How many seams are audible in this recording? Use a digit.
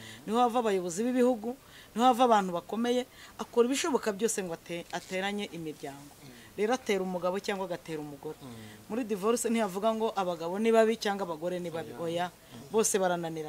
0